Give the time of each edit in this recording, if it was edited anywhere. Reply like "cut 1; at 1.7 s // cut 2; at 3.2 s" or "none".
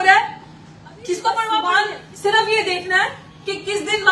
cut 1; at 1.7 s